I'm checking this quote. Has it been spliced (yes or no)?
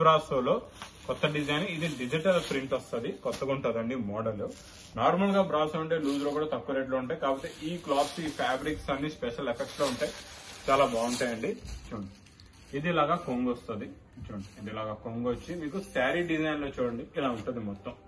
no